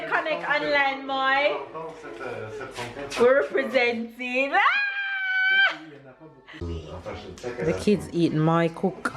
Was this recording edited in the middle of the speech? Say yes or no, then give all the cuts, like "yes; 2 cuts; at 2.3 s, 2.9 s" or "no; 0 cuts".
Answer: yes; 1 cut; at 6.5 s